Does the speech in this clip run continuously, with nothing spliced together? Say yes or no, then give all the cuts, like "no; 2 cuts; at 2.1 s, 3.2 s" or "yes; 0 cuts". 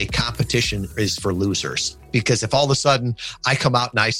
no; 2 cuts; at 0.9 s, 2.1 s